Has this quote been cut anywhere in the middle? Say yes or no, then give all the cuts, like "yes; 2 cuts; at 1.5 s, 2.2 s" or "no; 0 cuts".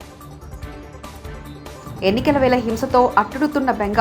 yes; 1 cut; at 1.0 s